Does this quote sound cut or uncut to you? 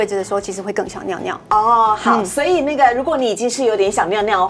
uncut